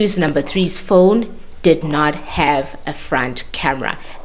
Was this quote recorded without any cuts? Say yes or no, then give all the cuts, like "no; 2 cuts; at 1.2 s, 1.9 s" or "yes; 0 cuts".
yes; 0 cuts